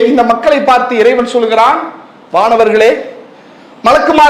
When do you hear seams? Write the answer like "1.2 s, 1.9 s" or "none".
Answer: none